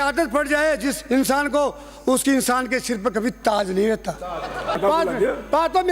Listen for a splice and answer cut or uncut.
cut